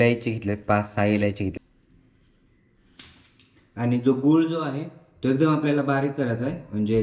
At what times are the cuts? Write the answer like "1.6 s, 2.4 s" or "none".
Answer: 1.5 s